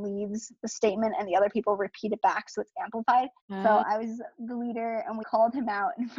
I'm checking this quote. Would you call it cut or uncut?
cut